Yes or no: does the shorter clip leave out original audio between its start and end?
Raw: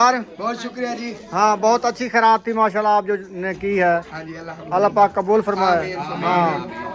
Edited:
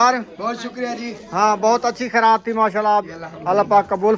yes